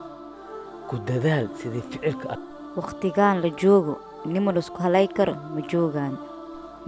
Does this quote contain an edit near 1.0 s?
no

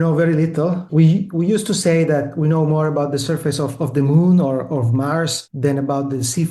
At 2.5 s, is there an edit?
no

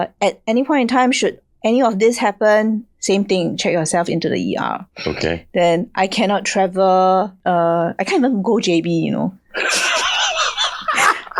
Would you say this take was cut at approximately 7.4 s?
yes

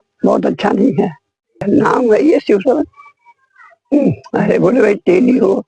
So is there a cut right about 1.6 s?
yes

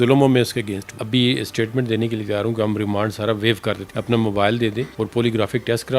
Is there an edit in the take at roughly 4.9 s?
yes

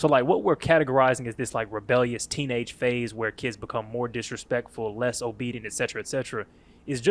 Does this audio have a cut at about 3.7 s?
no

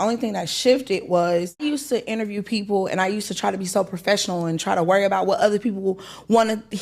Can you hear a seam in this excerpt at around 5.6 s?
no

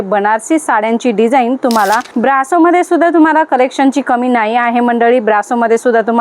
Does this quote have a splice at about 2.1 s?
yes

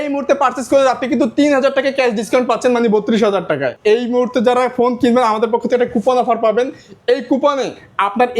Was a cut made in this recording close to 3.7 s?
yes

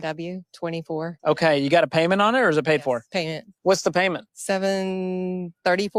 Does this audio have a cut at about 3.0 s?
no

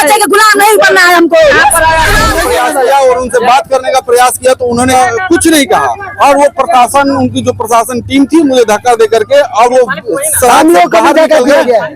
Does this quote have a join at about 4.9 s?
yes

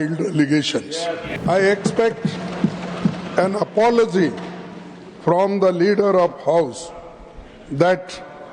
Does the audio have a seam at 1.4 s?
yes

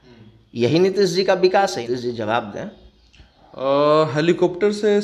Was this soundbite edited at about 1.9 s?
no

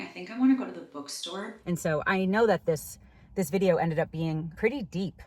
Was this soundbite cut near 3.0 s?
no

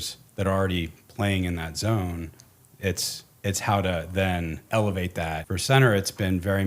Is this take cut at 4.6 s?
yes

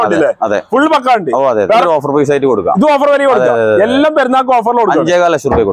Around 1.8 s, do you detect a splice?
yes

